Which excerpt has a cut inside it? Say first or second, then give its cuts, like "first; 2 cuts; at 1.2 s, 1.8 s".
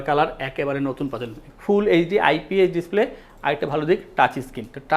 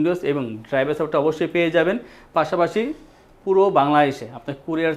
first; 1 cut; at 1.5 s